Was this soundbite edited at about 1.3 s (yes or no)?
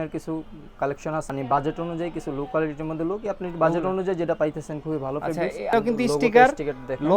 yes